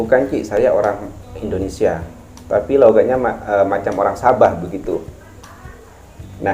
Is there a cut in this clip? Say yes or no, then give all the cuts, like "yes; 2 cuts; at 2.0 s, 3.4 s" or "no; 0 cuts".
no; 0 cuts